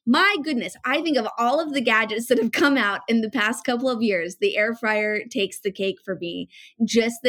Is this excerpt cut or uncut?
uncut